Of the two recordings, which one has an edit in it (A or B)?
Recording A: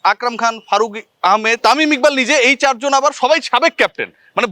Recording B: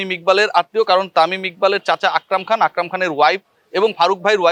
A